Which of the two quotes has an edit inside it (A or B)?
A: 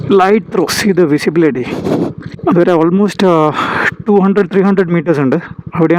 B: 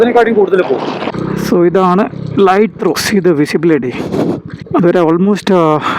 B